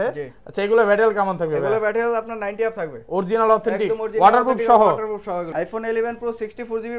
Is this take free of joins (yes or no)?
no